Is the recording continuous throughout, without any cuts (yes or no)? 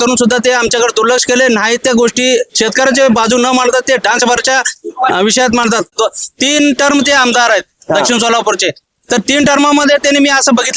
no